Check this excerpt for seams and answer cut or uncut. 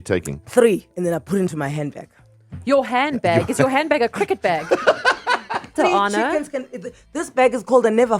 cut